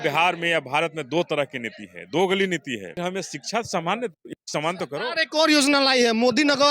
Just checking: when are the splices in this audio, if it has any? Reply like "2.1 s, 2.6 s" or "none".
3.0 s